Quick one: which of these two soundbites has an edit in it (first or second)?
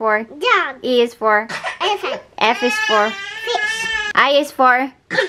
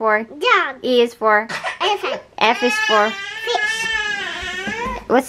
first